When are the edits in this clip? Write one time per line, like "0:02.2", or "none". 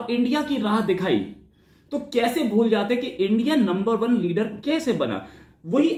none